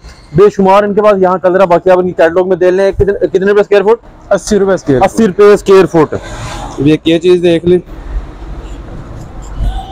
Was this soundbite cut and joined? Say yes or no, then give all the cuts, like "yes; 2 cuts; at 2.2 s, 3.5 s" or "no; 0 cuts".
no; 0 cuts